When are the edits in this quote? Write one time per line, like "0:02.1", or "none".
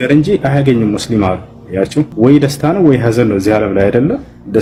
none